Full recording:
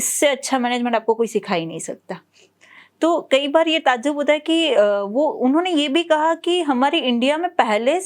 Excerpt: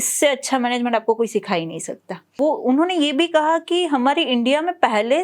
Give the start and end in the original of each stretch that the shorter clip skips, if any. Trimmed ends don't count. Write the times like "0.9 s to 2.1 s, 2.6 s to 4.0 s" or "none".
2.3 s to 5.1 s